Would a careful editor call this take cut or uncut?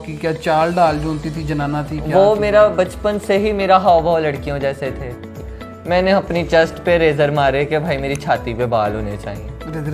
cut